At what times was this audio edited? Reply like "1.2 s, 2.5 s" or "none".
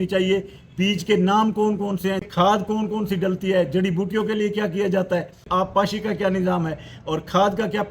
2.2 s, 5.4 s